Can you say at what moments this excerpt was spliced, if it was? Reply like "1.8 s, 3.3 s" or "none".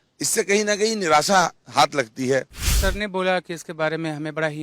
2.6 s